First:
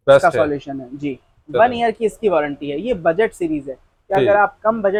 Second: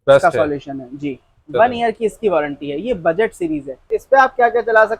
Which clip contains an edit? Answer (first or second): second